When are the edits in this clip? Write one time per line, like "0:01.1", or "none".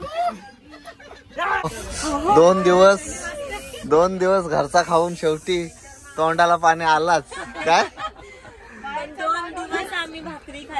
0:01.6